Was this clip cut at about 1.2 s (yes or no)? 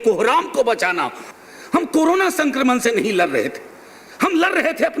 yes